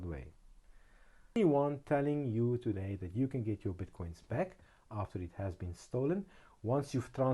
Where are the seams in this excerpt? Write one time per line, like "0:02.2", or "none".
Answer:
0:01.4